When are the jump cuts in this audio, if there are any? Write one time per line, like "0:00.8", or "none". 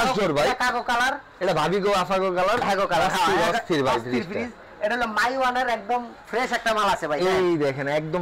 none